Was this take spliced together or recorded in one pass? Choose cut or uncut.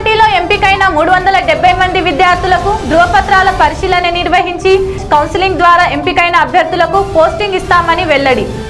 uncut